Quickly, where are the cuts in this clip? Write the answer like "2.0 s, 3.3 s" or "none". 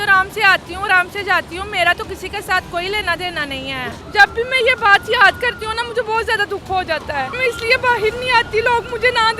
4.0 s, 7.4 s